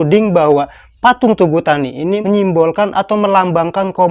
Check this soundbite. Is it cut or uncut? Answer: uncut